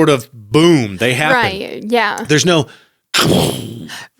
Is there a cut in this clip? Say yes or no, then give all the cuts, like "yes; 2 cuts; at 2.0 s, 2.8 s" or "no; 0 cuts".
no; 0 cuts